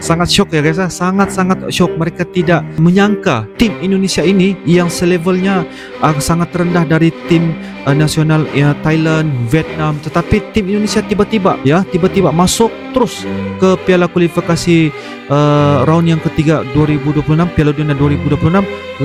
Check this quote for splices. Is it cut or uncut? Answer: uncut